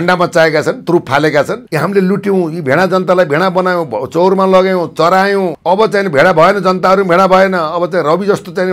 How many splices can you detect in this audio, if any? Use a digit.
2